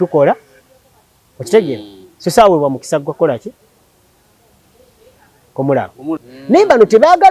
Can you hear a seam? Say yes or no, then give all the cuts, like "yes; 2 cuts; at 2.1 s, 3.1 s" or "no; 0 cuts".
yes; 1 cut; at 6.3 s